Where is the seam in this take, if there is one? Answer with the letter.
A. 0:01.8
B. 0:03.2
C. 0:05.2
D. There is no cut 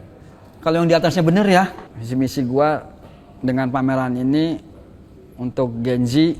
A